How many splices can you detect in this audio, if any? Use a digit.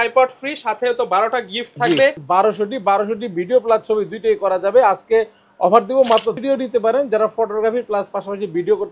2